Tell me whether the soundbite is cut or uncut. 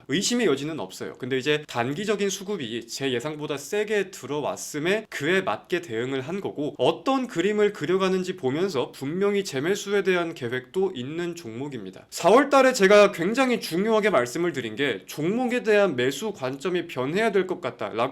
cut